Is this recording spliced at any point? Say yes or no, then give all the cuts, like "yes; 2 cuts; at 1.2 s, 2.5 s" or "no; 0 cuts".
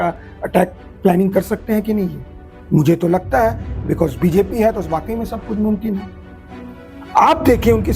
no; 0 cuts